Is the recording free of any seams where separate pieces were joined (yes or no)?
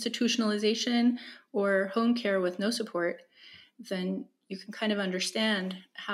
yes